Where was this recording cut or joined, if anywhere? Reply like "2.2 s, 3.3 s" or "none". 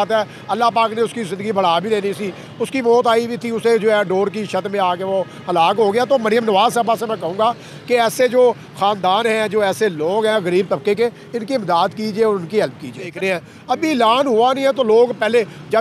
13.1 s